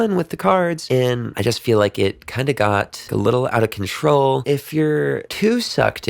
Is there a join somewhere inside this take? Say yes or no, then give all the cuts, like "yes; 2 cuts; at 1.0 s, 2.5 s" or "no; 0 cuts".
yes; 3 cuts; at 1.0 s, 3.0 s, 4.4 s